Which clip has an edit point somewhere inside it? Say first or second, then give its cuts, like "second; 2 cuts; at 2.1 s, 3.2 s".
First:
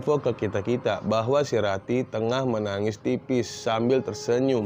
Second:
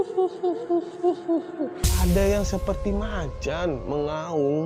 second; 1 cut; at 1.9 s